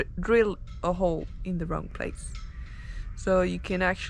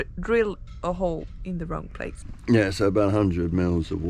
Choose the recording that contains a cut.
second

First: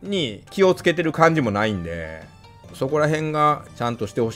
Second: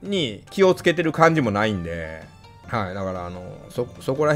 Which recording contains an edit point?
first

